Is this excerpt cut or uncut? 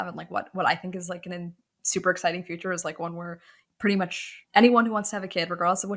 cut